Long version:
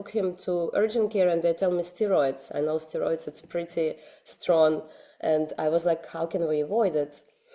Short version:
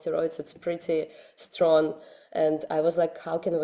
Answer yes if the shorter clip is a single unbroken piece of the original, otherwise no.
yes